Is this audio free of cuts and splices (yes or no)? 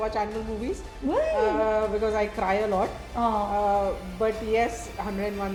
yes